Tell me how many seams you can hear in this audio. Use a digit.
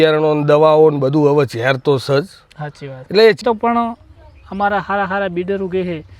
1